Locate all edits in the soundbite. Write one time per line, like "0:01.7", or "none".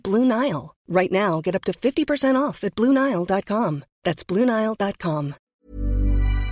0:05.4